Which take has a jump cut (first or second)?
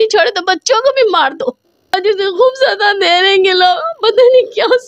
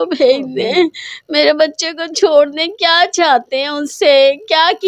first